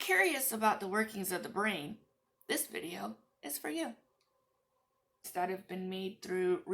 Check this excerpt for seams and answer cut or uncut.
cut